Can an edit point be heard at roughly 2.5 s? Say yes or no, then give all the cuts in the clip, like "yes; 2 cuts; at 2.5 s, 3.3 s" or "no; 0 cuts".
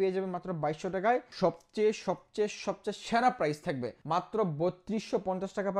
no; 2 cuts; at 1.3 s, 3.9 s